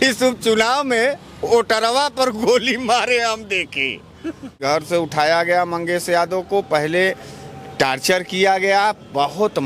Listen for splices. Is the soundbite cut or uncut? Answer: cut